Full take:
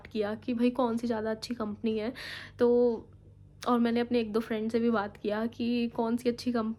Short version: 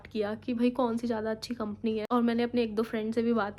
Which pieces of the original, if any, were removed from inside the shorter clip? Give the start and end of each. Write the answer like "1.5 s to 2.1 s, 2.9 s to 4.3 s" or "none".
2.0 s to 3.6 s